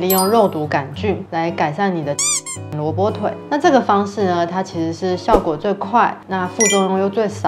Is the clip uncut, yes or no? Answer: yes